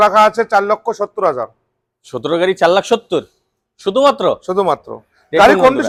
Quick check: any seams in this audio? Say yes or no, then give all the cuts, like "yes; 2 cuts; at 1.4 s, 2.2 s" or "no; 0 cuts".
no; 0 cuts